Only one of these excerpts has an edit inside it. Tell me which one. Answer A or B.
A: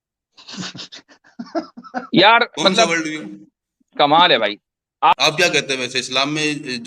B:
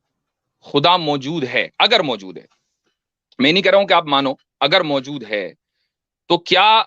A